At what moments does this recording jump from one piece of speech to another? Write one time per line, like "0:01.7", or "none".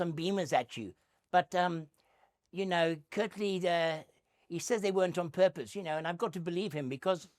none

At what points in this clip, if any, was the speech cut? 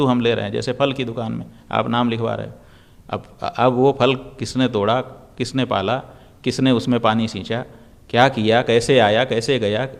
none

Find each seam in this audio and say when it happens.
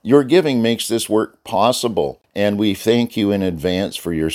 0:02.2

